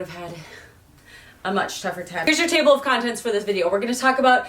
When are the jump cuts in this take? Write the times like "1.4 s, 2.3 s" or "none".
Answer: 2.3 s